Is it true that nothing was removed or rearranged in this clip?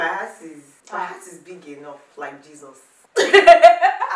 no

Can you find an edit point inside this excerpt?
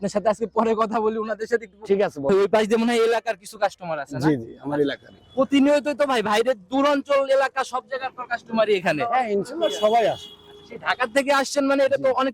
yes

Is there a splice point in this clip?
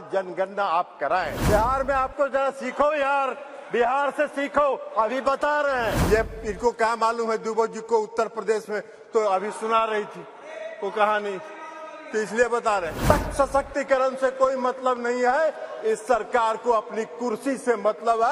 yes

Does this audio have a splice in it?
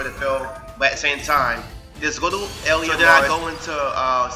yes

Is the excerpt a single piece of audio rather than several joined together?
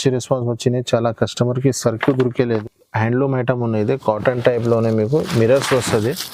no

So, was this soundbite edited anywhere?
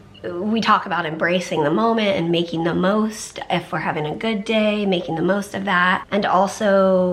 yes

